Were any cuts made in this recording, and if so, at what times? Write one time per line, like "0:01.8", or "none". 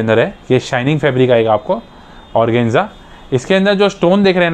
none